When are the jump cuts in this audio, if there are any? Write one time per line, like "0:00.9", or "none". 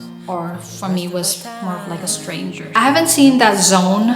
0:02.7